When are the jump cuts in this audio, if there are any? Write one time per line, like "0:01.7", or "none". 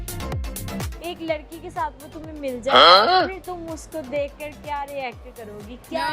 0:00.9